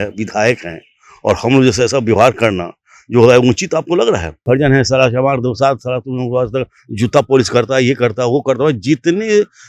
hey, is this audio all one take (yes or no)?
no